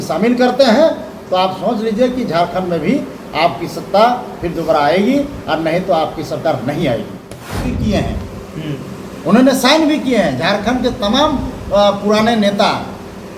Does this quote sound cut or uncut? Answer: cut